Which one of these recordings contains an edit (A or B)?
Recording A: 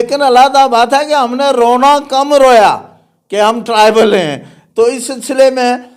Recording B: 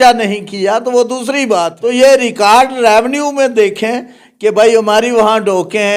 B